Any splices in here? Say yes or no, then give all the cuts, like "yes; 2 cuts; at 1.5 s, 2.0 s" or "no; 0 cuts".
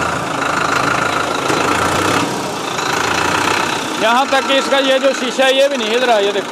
no; 0 cuts